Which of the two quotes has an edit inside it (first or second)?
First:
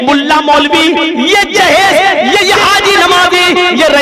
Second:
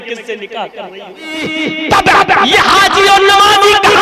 second